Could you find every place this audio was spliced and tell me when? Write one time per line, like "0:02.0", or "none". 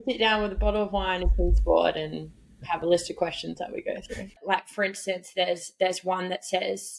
0:04.4